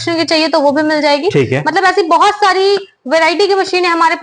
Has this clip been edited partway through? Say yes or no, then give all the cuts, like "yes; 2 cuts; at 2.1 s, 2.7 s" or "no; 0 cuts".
no; 0 cuts